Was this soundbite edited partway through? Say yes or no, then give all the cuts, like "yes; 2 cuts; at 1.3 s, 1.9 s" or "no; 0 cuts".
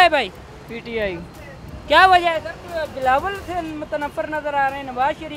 no; 0 cuts